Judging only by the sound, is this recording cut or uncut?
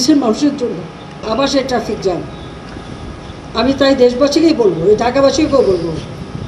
cut